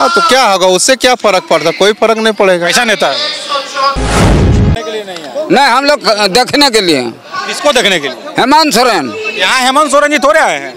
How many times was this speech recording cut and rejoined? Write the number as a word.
one